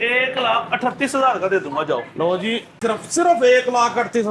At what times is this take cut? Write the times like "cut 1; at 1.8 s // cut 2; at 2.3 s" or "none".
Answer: cut 1; at 2.8 s

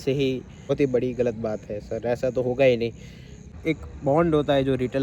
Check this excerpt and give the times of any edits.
cut 1; at 0.7 s // cut 2; at 3.6 s

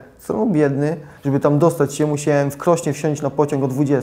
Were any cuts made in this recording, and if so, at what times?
cut 1; at 1.1 s

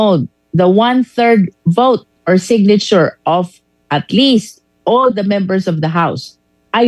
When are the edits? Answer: cut 1; at 1.2 s

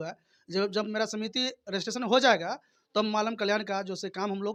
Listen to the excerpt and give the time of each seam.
none

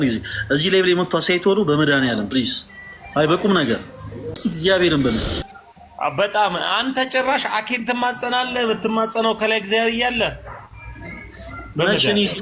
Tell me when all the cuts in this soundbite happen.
cut 1; at 4.4 s

